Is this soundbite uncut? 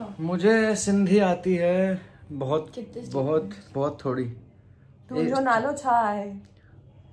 yes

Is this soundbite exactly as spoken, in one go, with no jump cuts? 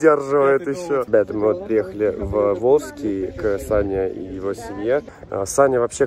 no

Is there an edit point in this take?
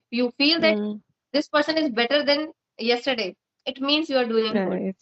no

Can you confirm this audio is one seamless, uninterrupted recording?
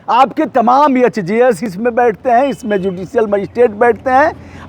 yes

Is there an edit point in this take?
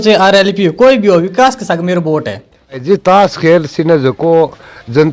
yes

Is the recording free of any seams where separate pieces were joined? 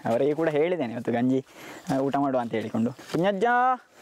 no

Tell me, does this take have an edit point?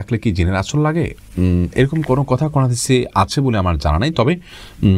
no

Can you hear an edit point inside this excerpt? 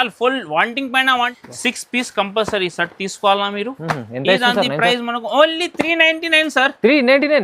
yes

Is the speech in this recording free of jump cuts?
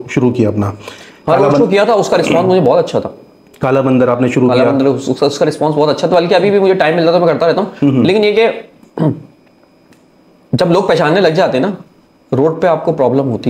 yes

